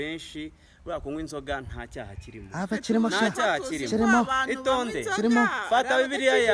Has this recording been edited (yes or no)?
no